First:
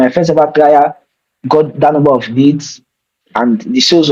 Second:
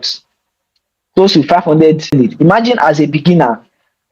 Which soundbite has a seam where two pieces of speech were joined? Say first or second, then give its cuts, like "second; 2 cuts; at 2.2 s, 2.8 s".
second; 1 cut; at 2.1 s